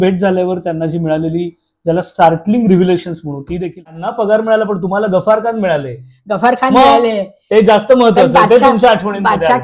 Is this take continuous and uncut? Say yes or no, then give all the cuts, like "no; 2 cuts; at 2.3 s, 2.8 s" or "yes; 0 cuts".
no; 1 cut; at 4.0 s